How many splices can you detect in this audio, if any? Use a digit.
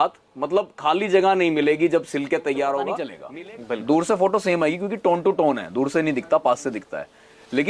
1